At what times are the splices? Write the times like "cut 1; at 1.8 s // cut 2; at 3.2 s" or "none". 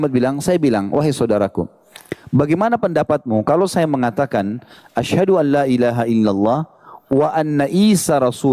none